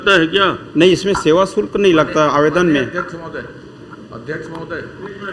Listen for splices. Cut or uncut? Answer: uncut